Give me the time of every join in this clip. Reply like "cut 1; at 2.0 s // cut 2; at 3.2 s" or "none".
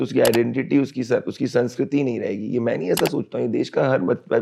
none